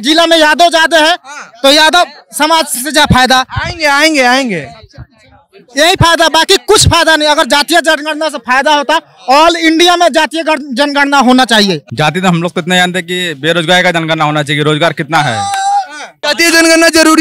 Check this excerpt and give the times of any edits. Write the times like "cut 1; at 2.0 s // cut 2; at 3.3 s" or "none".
cut 1; at 11.9 s // cut 2; at 16.2 s